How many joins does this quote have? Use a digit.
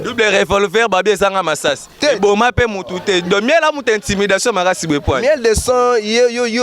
0